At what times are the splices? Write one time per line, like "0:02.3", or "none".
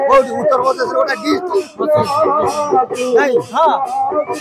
none